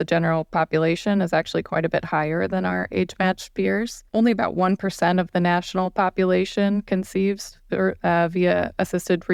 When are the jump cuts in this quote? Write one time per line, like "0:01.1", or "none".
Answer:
none